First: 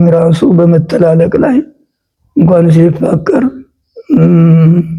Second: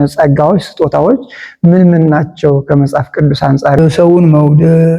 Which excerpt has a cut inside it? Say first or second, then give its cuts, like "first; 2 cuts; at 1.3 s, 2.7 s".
second; 1 cut; at 3.8 s